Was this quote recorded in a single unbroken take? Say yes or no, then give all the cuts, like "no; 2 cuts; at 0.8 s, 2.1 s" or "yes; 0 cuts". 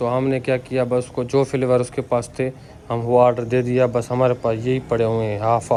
yes; 0 cuts